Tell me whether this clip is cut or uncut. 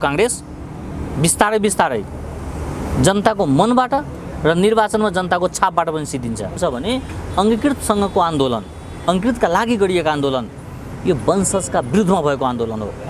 cut